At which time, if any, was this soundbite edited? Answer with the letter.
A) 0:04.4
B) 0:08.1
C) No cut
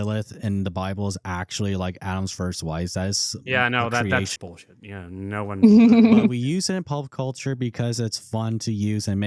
A